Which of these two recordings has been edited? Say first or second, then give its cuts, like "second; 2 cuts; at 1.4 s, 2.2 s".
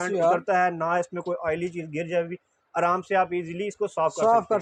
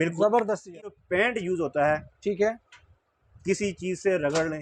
second; 1 cut; at 1.0 s